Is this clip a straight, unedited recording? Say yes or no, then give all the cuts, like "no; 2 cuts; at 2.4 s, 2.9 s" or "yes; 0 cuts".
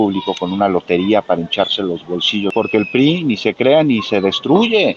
no; 1 cut; at 2.5 s